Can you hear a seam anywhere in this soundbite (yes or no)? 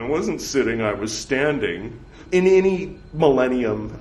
yes